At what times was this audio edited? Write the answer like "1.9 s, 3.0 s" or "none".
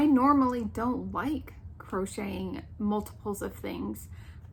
none